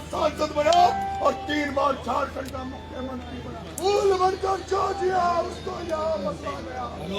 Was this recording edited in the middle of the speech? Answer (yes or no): yes